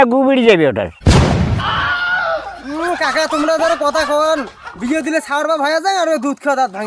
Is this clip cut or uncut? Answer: uncut